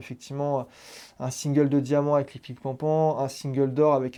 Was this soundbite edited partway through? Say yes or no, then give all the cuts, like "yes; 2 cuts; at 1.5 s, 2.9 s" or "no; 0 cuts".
no; 0 cuts